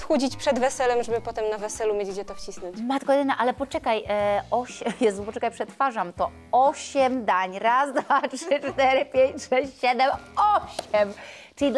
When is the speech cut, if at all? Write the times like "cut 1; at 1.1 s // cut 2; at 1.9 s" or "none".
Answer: none